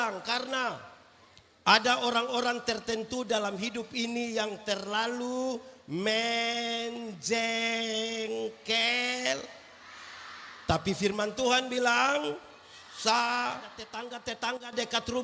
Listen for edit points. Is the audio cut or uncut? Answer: cut